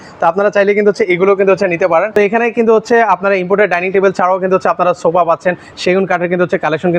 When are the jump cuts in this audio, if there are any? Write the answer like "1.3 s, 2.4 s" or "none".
2.1 s